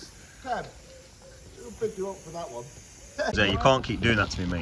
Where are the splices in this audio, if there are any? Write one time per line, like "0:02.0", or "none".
0:03.3